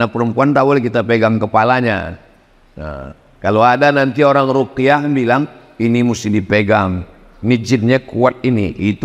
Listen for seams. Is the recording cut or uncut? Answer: uncut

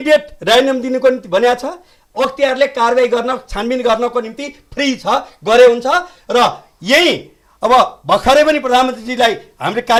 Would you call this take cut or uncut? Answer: uncut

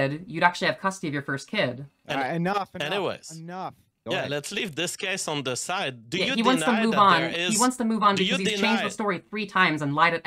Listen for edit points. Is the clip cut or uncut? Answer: cut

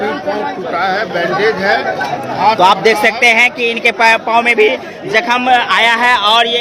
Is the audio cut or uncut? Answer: uncut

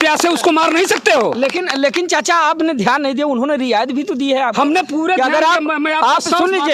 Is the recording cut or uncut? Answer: uncut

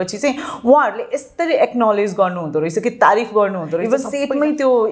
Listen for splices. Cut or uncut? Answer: cut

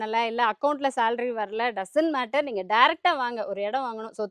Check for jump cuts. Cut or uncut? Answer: uncut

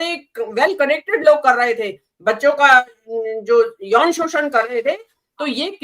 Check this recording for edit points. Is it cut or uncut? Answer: uncut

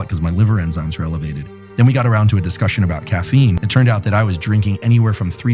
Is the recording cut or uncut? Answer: cut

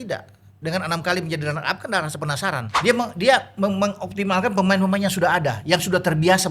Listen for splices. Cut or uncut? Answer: cut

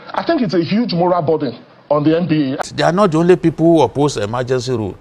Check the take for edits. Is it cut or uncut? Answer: cut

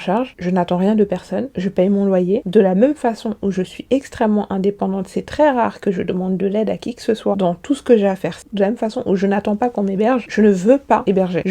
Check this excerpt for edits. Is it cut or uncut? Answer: cut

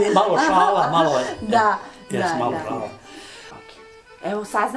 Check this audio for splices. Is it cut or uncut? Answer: cut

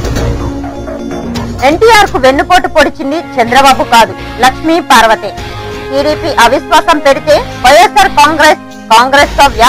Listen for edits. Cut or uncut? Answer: uncut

